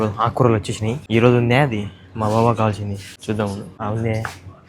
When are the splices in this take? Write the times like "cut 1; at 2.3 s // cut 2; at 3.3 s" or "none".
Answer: cut 1; at 1.0 s // cut 2; at 3.1 s // cut 3; at 3.7 s

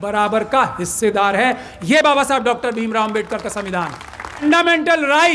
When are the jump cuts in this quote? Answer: cut 1; at 4.4 s

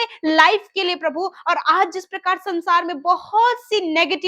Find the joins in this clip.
none

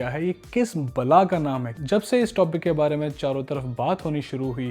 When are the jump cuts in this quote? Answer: cut 1; at 1.7 s

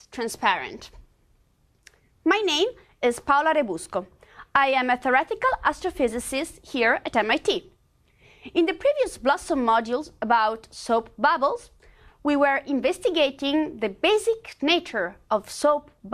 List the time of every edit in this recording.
cut 1; at 2.0 s

